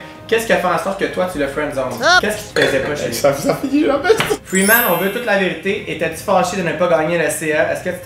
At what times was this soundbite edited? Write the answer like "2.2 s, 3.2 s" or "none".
4.4 s